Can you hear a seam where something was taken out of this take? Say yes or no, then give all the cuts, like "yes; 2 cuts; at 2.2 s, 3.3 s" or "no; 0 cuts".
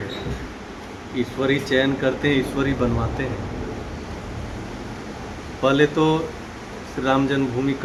no; 0 cuts